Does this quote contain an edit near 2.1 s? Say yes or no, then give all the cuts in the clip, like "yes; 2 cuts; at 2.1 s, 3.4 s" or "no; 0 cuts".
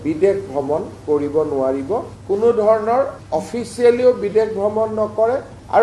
yes; 1 cut; at 2.1 s